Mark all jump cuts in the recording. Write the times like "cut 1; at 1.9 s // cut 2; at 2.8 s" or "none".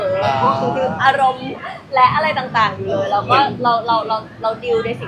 none